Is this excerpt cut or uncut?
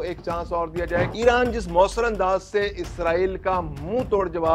cut